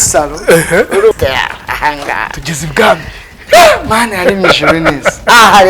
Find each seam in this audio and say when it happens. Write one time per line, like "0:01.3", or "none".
0:01.1